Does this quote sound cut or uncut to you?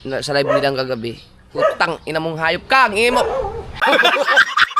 uncut